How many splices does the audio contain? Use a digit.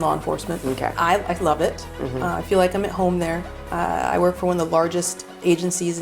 1